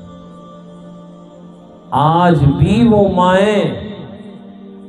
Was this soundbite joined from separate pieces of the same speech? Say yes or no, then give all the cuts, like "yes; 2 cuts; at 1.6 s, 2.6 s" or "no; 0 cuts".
no; 0 cuts